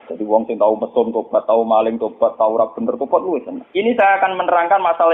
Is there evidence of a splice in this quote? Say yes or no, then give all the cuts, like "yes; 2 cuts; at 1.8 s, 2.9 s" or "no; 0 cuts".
yes; 1 cut; at 3.6 s